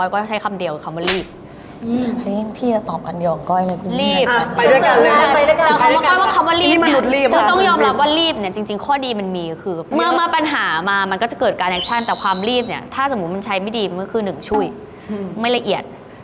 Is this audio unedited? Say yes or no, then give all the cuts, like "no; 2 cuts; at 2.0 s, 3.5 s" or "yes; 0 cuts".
yes; 0 cuts